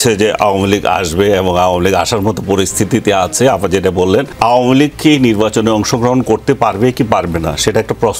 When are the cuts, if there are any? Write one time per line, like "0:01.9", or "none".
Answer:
0:04.3